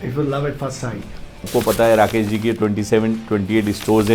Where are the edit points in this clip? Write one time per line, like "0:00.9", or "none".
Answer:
0:01.4